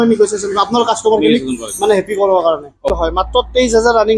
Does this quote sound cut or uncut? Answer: cut